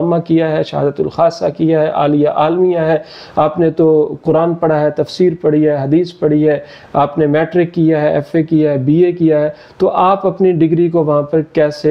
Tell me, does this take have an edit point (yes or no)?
no